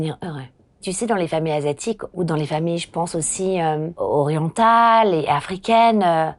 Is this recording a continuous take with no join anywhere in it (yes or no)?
no